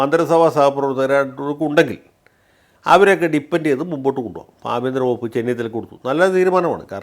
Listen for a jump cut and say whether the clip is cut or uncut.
uncut